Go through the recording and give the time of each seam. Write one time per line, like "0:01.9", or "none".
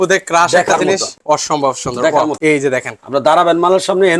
0:01.1
0:02.4

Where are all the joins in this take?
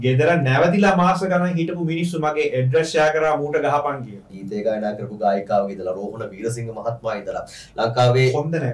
0:04.4

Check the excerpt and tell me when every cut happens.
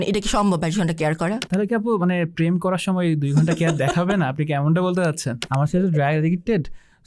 0:05.4

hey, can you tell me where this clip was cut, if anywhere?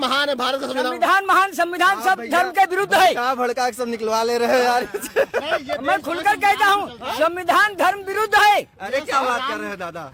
none

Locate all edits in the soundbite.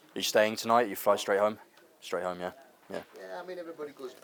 none

